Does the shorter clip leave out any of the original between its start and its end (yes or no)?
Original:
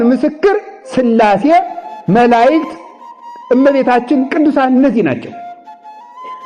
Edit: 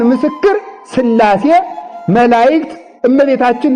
yes